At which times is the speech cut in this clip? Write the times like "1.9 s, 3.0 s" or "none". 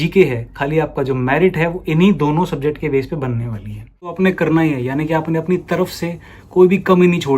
4.1 s